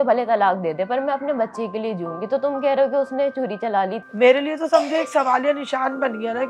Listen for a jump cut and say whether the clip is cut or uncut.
cut